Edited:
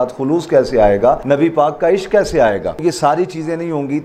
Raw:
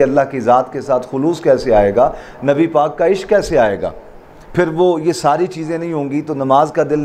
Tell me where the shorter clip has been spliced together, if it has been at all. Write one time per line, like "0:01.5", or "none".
0:01.2
0:02.8